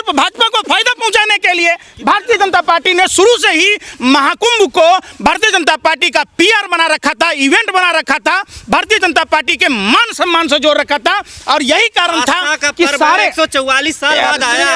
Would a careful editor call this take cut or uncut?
uncut